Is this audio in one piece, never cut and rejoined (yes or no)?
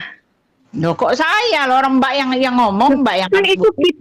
yes